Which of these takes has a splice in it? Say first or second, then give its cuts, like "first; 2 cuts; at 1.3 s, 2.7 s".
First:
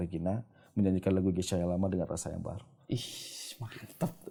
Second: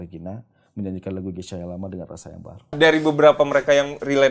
second; 1 cut; at 2.7 s